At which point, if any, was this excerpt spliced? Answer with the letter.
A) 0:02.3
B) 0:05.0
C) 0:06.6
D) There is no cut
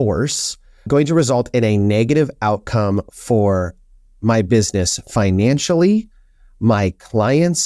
D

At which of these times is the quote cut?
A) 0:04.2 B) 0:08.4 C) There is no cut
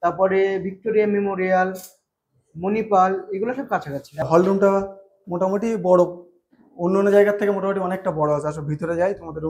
A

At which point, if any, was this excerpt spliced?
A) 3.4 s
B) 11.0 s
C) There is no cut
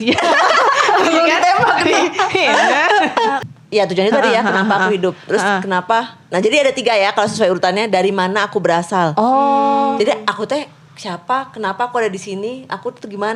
A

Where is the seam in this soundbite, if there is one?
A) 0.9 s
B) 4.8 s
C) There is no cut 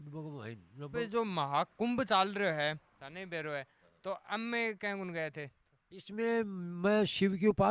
A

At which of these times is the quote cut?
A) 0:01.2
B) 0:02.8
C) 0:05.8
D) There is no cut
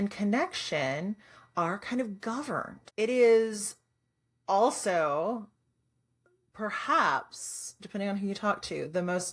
B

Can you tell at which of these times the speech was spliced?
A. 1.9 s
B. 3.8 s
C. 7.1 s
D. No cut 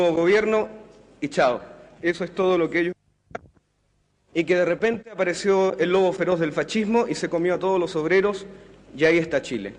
C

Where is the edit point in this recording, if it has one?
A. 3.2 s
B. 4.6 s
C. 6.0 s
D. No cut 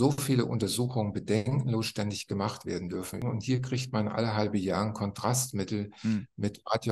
A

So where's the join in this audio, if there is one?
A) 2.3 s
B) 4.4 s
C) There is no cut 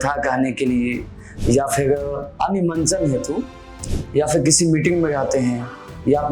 A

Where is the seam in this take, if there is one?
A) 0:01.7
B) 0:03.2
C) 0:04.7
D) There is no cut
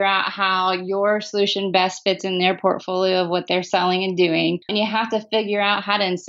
C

